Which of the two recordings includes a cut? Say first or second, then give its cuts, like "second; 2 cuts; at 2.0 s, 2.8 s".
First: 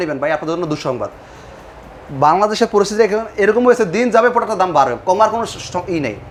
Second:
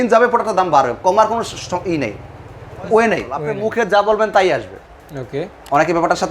second; 1 cut; at 3.6 s